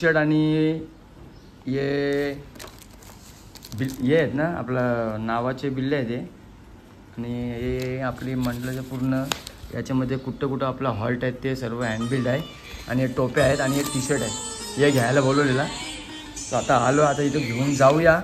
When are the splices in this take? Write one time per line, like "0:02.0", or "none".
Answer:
none